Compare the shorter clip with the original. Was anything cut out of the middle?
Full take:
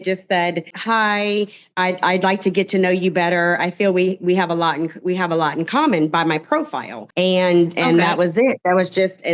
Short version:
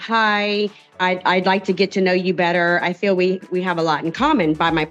yes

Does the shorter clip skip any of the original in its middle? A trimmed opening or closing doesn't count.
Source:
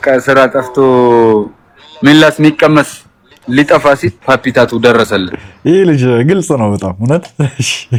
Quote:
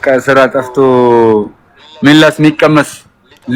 no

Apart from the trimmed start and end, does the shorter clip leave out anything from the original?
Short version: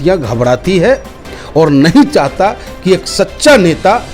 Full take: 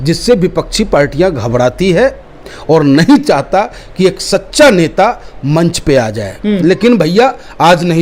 no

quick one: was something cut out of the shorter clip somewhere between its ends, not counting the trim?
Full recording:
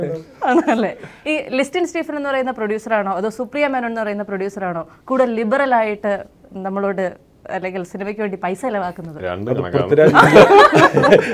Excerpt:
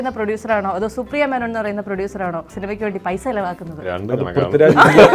yes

